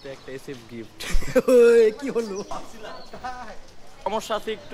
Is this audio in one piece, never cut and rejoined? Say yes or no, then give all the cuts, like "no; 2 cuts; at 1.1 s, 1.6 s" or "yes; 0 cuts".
no; 2 cuts; at 2.5 s, 4.1 s